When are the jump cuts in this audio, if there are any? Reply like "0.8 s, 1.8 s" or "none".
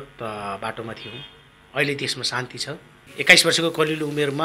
3.1 s